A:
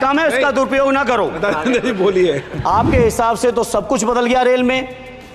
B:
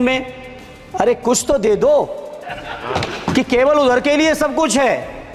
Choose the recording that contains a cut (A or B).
A